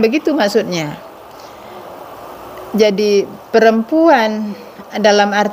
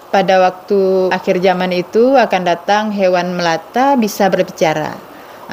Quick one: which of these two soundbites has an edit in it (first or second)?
second